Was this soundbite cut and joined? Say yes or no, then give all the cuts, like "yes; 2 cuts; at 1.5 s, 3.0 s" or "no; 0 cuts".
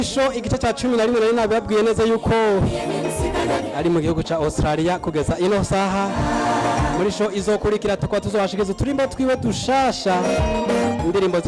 no; 0 cuts